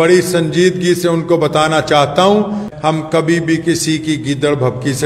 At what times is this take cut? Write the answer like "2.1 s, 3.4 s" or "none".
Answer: 2.7 s